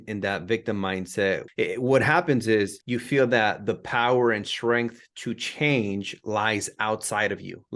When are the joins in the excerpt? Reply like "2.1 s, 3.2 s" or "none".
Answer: 1.5 s, 2.9 s